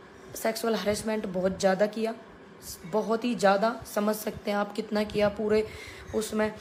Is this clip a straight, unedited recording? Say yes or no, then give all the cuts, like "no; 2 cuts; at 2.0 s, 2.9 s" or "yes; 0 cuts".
yes; 0 cuts